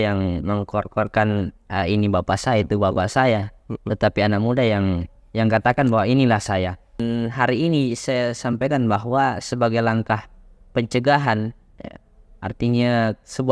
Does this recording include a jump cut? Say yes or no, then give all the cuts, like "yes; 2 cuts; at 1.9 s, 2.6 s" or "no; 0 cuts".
yes; 1 cut; at 7.0 s